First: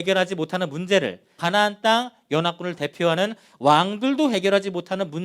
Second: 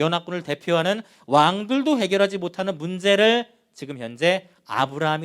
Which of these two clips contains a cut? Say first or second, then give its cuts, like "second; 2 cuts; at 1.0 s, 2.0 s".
first; 1 cut; at 1.4 s